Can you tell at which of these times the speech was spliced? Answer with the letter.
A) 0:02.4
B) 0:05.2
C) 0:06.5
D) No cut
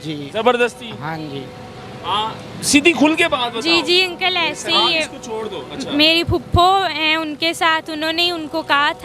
D